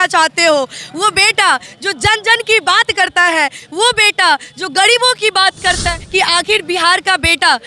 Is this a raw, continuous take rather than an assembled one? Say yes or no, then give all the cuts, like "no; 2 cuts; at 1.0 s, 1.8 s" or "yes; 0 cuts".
no; 1 cut; at 5.9 s